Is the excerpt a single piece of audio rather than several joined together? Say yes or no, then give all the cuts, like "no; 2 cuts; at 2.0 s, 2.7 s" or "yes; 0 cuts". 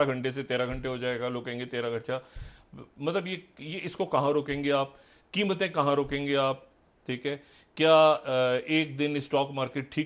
yes; 0 cuts